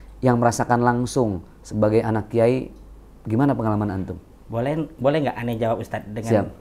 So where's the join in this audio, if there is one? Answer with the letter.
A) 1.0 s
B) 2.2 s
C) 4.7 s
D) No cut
D